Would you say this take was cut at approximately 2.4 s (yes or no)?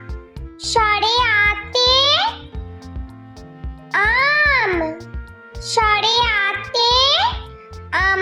yes